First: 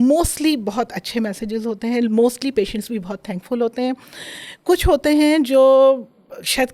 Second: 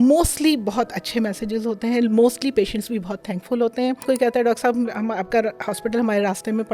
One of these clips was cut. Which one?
second; 1 cut; at 4.1 s

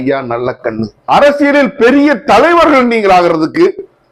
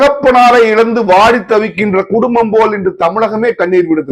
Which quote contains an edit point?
first; 1 cut; at 0.9 s

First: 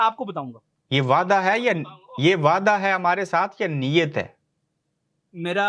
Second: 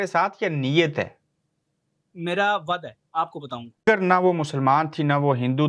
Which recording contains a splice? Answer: second; 1 cut; at 3.8 s

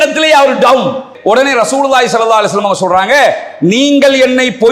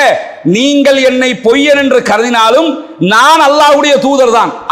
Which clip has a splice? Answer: first; 1 cut; at 1.1 s

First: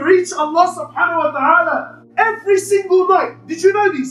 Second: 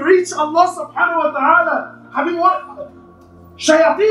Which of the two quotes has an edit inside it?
first; 1 cut; at 2.0 s

